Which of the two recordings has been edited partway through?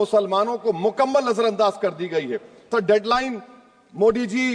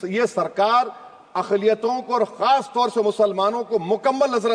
first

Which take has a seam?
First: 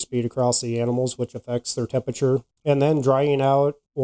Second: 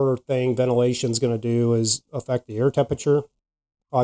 first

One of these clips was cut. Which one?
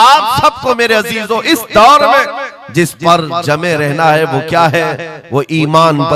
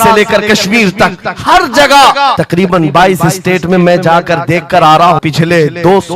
second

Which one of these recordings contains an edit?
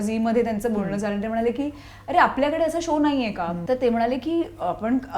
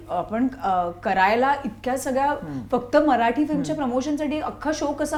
first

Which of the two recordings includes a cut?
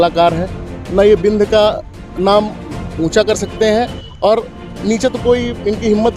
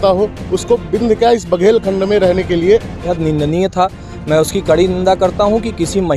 second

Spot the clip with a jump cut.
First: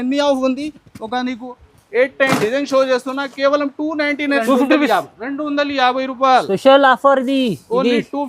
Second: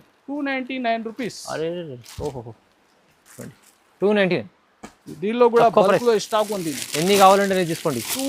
first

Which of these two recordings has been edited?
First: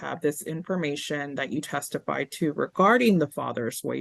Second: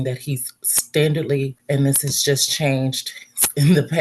second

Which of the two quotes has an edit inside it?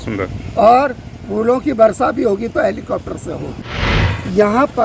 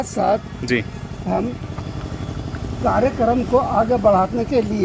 first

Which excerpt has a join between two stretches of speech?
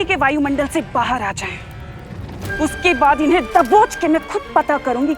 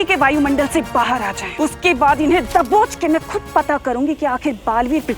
second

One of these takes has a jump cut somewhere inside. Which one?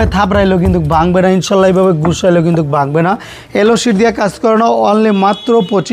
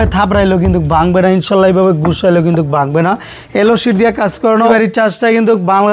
second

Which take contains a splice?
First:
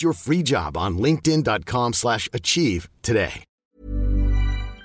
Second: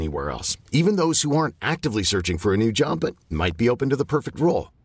first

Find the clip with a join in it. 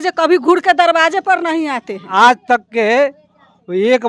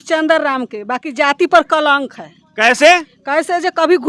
first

